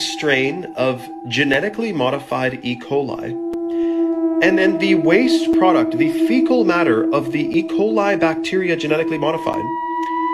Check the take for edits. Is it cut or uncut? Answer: uncut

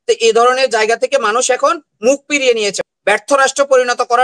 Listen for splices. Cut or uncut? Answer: cut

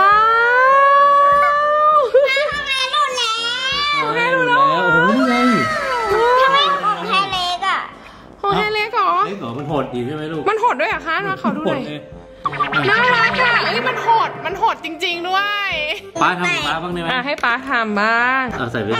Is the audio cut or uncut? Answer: uncut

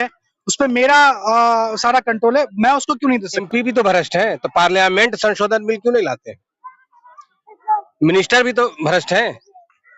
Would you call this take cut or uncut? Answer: cut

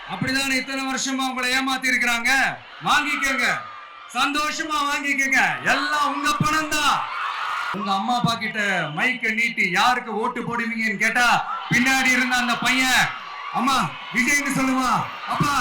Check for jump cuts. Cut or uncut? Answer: cut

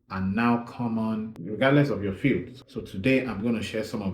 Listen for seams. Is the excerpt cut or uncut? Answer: cut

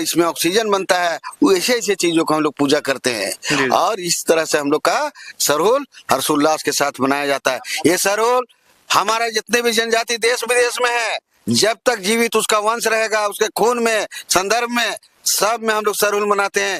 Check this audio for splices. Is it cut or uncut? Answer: uncut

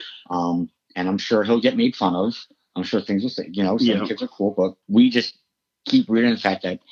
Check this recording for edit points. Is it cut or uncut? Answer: cut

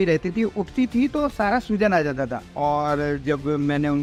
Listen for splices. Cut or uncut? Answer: uncut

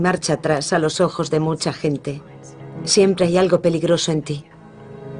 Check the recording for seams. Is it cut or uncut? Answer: cut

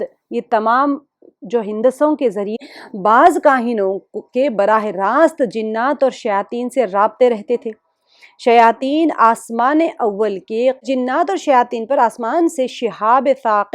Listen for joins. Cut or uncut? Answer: cut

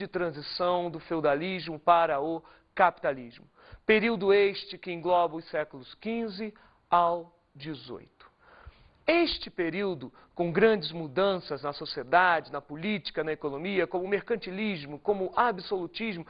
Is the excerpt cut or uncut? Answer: cut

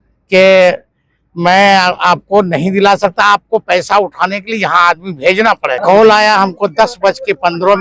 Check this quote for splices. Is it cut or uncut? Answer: cut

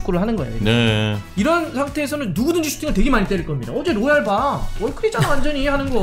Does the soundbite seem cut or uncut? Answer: cut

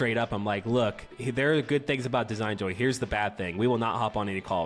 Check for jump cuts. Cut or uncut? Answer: cut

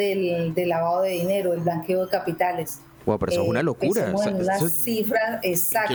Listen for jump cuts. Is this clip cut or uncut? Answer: uncut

